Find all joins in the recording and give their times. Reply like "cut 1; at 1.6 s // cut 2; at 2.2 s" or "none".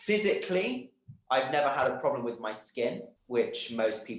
none